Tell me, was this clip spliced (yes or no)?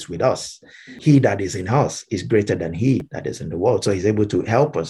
yes